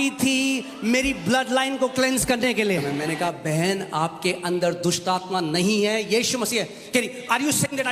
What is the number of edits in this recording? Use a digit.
1